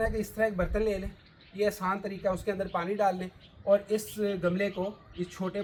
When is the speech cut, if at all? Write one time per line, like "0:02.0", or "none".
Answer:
none